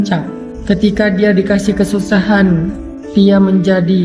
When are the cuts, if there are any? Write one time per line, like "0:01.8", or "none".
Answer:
none